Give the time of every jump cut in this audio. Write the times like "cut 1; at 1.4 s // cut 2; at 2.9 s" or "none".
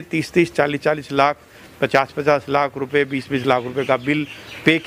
none